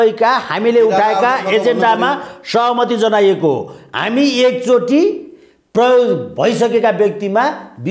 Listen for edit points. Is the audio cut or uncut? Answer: uncut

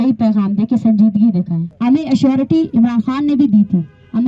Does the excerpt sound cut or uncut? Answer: cut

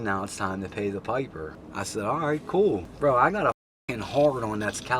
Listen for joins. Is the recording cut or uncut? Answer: cut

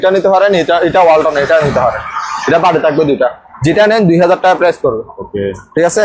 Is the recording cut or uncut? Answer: uncut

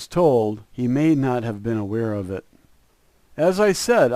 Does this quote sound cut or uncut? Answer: uncut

